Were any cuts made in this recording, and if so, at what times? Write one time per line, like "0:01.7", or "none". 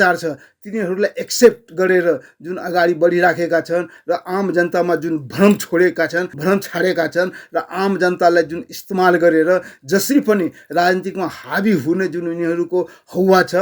0:06.3